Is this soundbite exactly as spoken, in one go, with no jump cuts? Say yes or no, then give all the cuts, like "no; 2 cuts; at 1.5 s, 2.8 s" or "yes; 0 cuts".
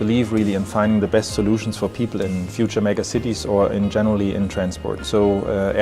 no; 1 cut; at 2.3 s